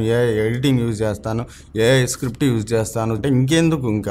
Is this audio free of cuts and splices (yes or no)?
no